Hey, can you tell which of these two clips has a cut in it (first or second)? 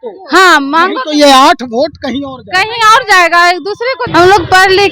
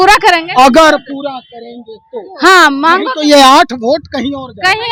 first